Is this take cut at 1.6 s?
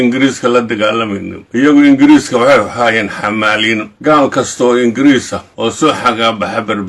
yes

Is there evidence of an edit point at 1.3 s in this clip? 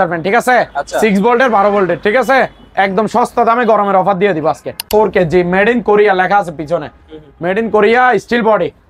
no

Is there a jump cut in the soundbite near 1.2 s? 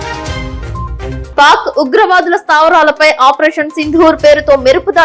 yes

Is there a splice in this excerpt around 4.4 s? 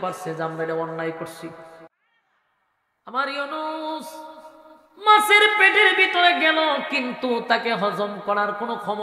no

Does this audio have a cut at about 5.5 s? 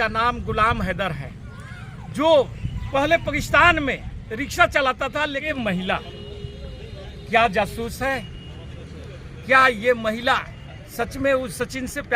yes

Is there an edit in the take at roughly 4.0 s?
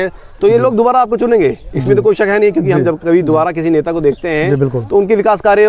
no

